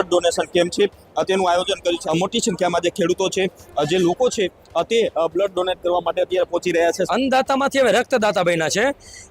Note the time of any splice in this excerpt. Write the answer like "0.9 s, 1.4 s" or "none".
2.0 s, 7.1 s